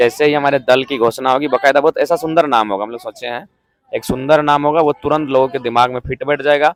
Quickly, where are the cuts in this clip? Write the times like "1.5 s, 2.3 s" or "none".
none